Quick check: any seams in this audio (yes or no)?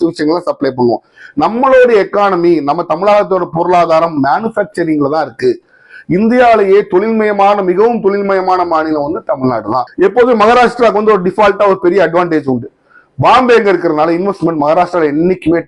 yes